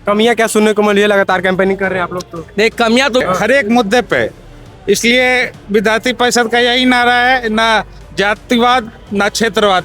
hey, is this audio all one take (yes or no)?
no